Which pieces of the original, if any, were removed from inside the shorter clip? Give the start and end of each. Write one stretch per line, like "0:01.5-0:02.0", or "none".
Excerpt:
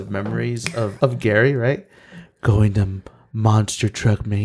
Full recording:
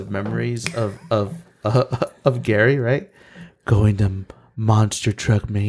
0:00.9-0:02.2